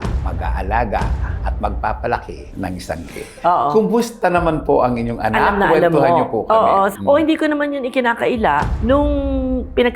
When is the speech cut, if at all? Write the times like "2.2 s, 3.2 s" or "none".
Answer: 4.1 s, 8.7 s